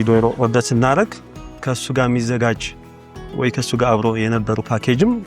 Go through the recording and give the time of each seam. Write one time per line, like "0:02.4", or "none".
none